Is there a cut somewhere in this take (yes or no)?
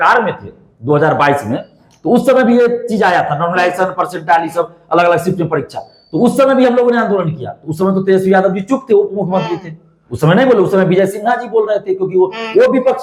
no